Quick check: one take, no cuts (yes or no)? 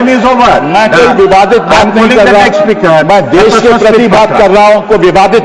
yes